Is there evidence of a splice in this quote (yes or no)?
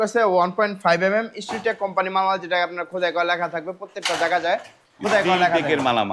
no